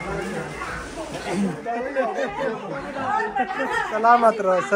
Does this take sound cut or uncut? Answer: cut